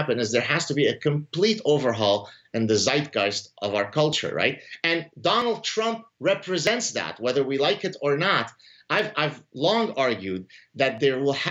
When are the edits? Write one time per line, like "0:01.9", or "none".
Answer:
none